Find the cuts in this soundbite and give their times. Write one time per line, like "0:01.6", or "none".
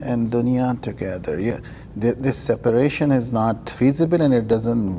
none